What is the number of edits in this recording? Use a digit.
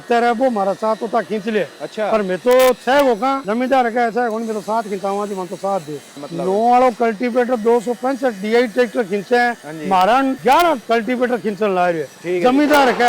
3